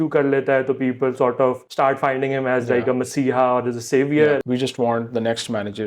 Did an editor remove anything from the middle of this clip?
yes; 2 cuts; at 1.7 s, 4.4 s

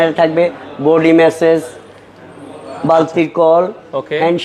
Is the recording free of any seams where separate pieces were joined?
yes; 0 cuts

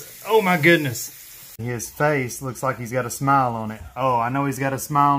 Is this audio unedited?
no; 1 cut; at 1.6 s

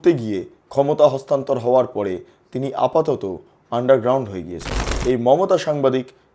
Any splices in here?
yes; 1 cut; at 4.9 s

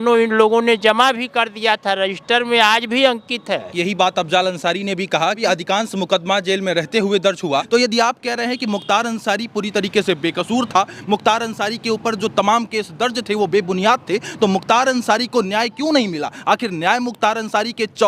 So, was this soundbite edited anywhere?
yes; 3 cuts; at 3.7 s, 5.4 s, 7.7 s

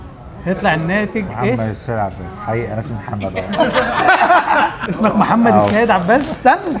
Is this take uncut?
no; 1 cut; at 4.8 s

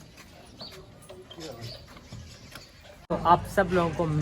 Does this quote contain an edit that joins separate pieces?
yes; 1 cut; at 3.0 s

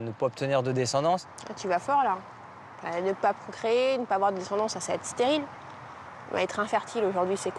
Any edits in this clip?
yes; 1 cut; at 1.3 s

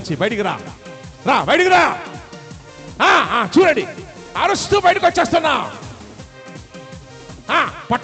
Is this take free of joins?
yes; 0 cuts

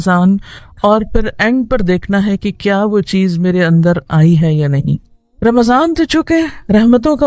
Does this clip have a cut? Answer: no; 0 cuts

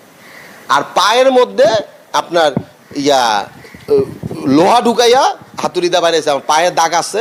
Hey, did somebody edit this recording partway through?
no; 0 cuts

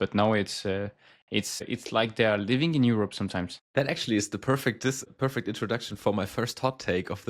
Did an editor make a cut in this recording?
yes; 3 cuts; at 1.6 s, 3.6 s, 5.0 s

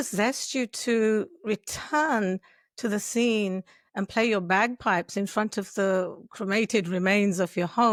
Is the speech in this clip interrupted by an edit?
no; 0 cuts

